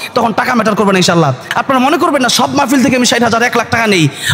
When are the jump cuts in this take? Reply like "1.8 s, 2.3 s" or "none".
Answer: 1.5 s